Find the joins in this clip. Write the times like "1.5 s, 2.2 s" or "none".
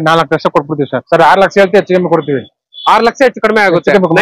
1.0 s